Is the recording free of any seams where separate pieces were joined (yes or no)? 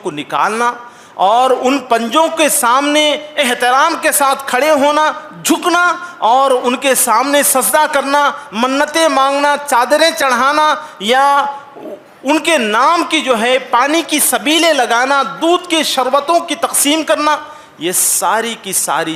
yes